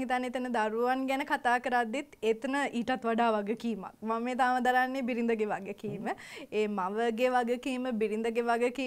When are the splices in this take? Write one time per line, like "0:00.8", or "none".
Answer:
none